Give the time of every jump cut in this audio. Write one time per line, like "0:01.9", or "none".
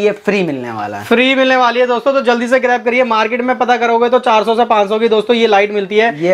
none